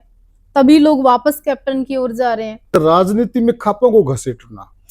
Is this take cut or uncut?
cut